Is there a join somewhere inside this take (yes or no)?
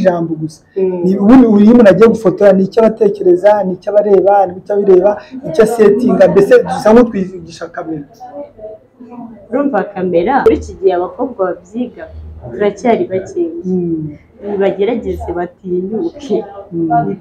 yes